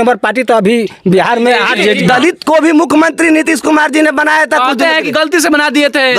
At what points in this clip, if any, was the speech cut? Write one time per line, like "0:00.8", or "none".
0:02.0